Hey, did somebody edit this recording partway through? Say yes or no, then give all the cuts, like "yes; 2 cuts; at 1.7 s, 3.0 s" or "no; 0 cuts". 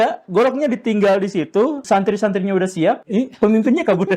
yes; 2 cuts; at 1.8 s, 3.0 s